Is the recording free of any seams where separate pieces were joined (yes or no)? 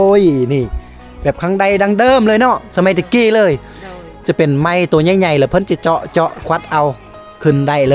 yes